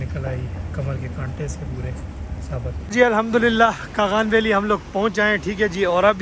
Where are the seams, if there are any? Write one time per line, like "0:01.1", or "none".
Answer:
0:02.9